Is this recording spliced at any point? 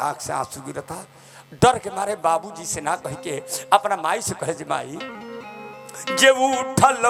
no; 0 cuts

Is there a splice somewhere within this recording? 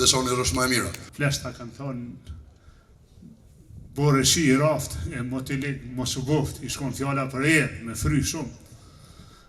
yes; 1 cut; at 1.0 s

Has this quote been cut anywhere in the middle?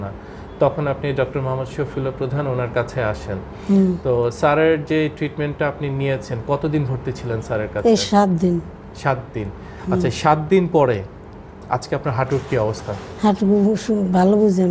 no; 0 cuts

